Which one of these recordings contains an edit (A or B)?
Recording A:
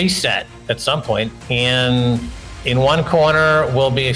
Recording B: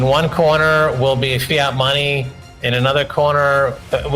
A